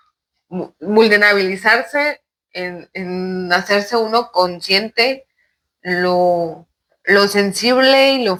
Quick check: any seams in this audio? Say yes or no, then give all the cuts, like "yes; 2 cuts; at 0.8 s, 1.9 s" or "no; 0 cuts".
no; 0 cuts